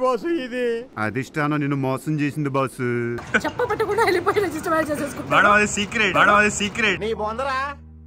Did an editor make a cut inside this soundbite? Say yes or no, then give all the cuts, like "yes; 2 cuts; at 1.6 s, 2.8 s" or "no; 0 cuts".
no; 0 cuts